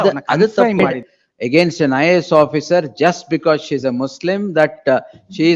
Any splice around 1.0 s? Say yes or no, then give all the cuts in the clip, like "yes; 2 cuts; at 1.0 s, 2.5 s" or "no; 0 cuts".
yes; 1 cut; at 1.0 s